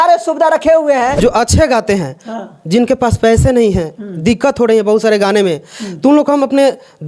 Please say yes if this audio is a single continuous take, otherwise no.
no